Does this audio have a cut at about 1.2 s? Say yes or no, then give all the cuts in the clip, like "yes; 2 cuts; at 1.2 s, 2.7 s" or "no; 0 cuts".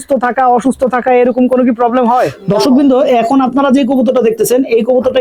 no; 1 cut; at 2.4 s